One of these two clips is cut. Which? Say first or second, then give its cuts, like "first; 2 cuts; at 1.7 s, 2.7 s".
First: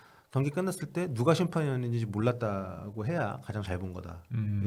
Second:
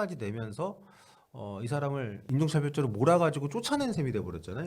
second; 1 cut; at 2.2 s